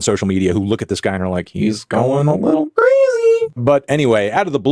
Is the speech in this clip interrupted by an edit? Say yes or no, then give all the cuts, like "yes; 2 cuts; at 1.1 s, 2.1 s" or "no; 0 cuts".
yes; 1 cut; at 3.5 s